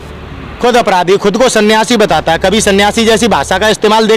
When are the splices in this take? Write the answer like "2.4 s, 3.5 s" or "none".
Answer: none